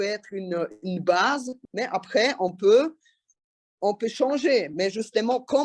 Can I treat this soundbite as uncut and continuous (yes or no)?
no